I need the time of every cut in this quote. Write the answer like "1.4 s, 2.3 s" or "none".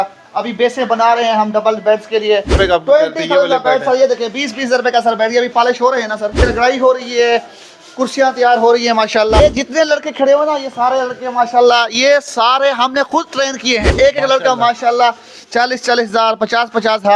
2.5 s, 6.4 s, 9.4 s, 13.9 s